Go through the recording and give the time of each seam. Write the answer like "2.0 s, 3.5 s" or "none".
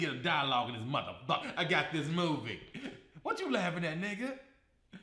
1.5 s